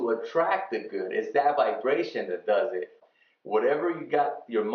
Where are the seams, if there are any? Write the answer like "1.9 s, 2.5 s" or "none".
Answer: 3.0 s